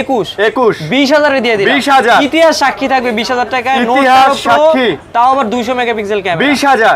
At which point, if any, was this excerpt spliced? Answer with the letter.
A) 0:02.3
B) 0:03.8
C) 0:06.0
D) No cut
D